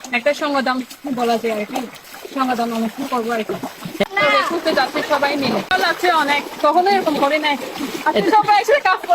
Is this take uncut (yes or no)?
no